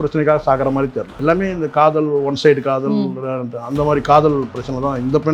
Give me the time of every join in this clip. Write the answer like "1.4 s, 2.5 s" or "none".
1.1 s